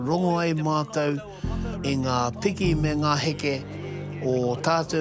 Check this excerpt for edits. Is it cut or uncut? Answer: uncut